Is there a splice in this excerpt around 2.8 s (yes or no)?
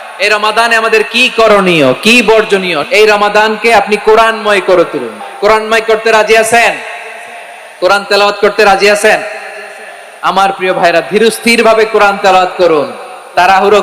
yes